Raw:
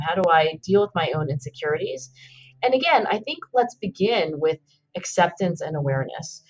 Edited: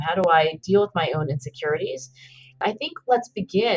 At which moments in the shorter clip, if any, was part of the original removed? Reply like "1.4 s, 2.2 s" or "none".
2.6 s